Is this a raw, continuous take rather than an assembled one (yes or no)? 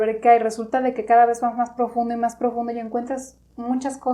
yes